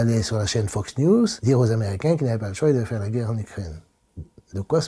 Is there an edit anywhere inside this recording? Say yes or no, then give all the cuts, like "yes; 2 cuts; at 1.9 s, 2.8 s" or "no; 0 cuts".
yes; 1 cut; at 1.4 s